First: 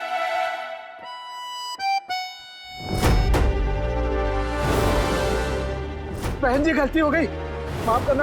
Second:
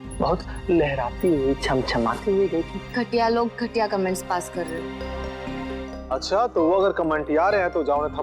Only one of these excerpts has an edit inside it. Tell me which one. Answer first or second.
second